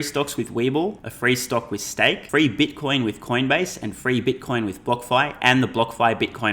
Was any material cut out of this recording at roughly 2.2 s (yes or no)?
yes